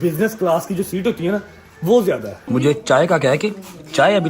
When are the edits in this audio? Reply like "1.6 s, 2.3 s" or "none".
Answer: 2.3 s